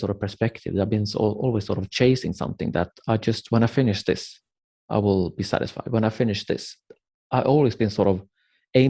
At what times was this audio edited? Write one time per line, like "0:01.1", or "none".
none

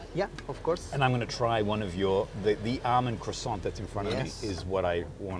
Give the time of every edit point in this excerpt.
none

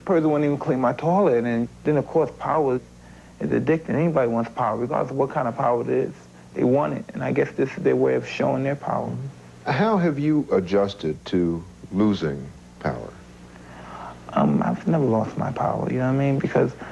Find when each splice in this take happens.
none

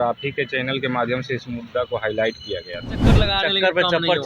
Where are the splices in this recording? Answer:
0:03.2

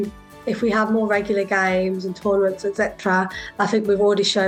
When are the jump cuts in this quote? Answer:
none

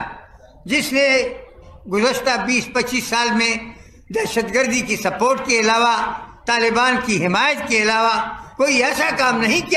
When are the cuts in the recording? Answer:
none

